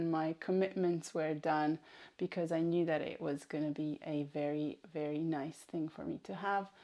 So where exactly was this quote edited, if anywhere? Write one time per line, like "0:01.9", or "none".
none